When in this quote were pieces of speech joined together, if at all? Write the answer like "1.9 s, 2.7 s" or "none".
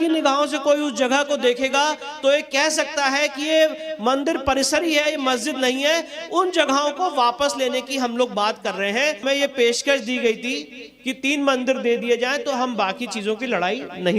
9.2 s